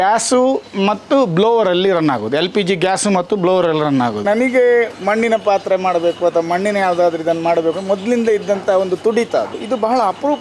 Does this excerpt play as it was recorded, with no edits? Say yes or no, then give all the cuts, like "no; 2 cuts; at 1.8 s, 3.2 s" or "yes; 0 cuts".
no; 2 cuts; at 4.2 s, 9.6 s